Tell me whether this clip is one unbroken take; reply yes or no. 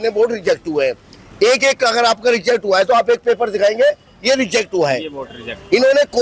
yes